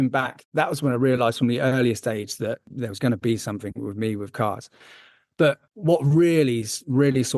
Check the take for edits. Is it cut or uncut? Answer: uncut